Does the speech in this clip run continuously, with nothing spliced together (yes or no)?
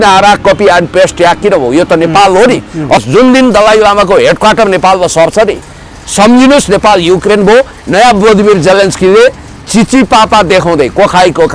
no